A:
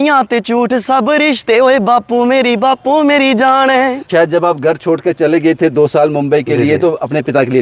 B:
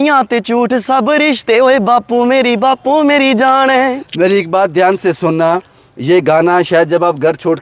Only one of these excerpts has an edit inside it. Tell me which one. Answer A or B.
A